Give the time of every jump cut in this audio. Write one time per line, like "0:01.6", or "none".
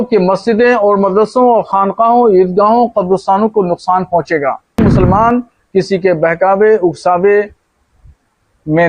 0:04.8